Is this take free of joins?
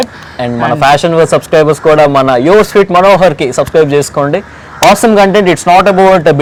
yes; 0 cuts

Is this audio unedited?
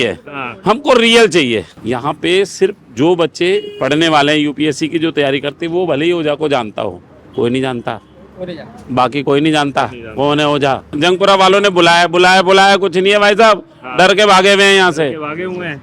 no; 2 cuts; at 1.7 s, 10.9 s

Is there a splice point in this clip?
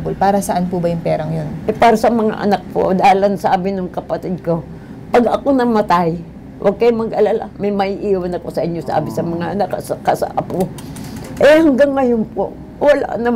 no; 0 cuts

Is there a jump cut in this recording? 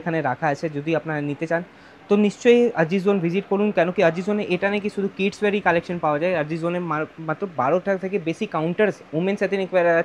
no; 0 cuts

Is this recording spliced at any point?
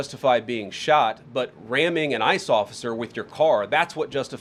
no; 0 cuts

